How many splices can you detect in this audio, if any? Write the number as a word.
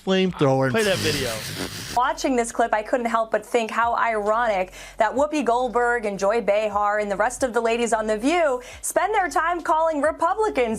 one